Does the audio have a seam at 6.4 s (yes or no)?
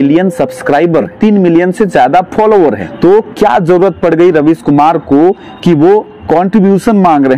no